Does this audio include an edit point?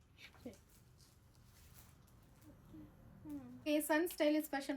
yes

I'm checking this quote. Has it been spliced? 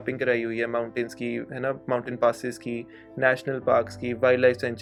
no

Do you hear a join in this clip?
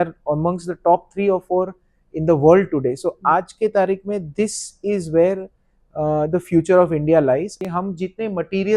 yes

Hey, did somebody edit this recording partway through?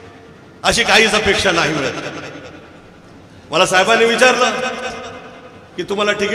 no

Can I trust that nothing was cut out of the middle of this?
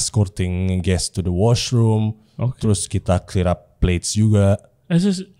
yes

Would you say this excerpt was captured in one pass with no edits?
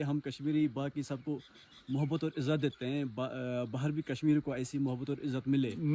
yes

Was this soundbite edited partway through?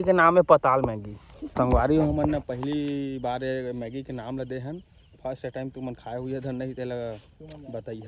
yes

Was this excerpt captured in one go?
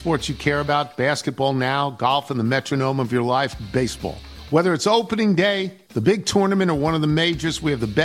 yes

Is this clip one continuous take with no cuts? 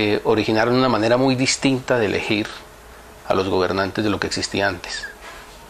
no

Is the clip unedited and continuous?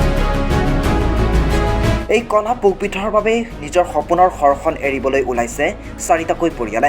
no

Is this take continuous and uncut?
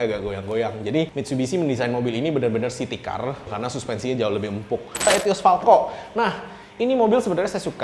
no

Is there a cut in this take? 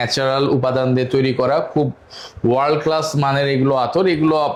no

